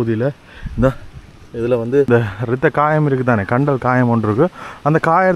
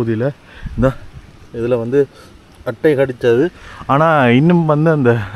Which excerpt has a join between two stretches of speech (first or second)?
first